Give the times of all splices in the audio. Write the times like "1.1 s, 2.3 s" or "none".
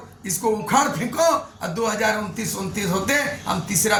none